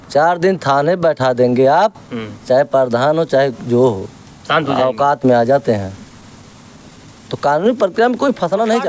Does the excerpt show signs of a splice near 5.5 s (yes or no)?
no